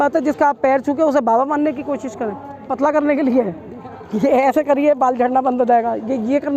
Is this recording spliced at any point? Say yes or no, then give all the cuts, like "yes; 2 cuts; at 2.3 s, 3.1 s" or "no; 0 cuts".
yes; 1 cut; at 2.7 s